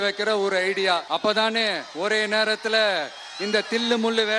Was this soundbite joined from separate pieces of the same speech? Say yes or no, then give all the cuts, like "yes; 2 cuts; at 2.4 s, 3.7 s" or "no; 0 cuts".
yes; 1 cut; at 1.0 s